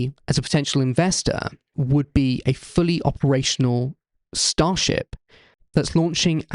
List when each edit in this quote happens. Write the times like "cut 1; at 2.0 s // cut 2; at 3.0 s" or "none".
cut 1; at 1.7 s // cut 2; at 5.5 s